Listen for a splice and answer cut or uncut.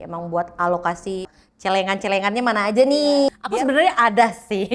cut